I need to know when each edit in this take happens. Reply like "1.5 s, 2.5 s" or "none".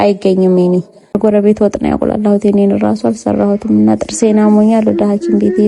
1.2 s

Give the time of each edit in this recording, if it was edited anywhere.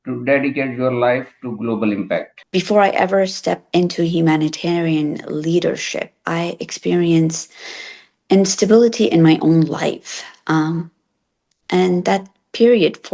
2.4 s

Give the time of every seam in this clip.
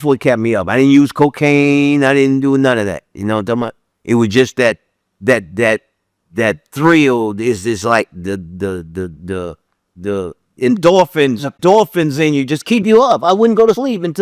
11.6 s

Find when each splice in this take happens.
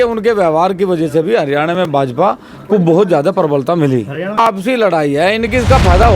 4.4 s

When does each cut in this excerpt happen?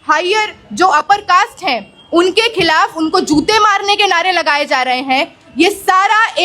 none

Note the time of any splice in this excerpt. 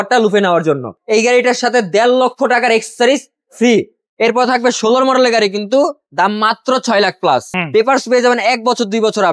0.9 s, 4.0 s, 7.5 s

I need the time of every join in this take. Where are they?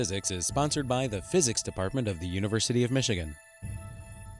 3.5 s

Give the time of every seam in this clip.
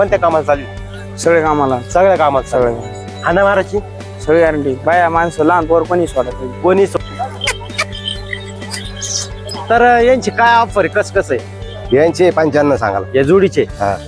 7.0 s

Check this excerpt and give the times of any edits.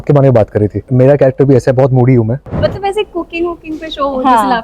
0.9 s, 2.4 s

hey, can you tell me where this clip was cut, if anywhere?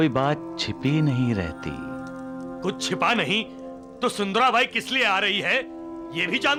none

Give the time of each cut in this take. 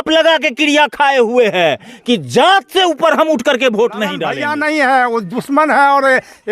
4.3 s

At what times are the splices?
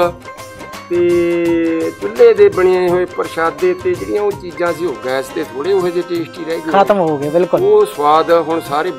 none

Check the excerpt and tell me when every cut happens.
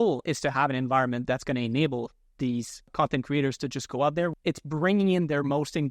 2.9 s, 4.3 s

